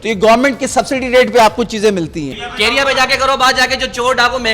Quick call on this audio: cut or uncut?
cut